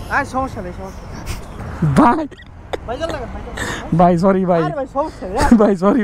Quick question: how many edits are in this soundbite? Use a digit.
1